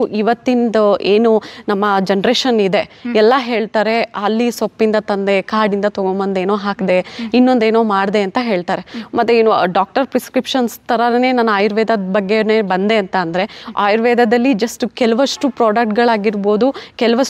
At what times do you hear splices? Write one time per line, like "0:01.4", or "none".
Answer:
none